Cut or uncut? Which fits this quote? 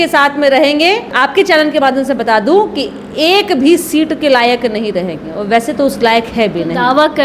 cut